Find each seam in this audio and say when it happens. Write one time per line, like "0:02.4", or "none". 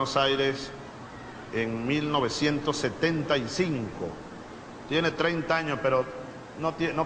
none